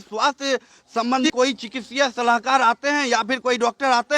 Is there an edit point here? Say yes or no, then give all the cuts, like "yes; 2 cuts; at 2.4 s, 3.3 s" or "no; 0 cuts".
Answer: yes; 1 cut; at 1.3 s